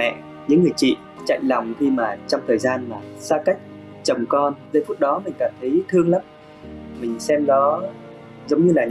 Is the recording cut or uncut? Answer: uncut